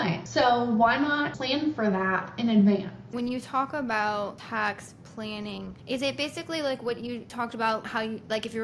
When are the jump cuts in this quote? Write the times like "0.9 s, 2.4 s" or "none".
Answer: none